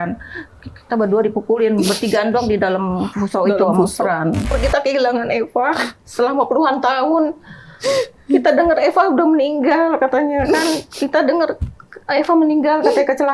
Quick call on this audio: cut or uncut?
cut